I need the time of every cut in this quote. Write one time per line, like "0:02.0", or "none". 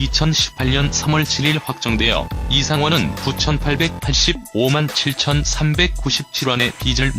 0:02.5